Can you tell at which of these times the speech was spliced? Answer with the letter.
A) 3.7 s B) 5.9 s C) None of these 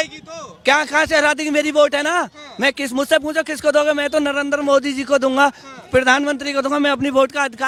C